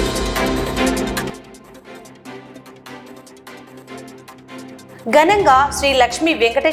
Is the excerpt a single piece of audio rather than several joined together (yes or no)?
yes